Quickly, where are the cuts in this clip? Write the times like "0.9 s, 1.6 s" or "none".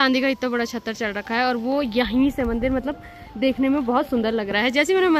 none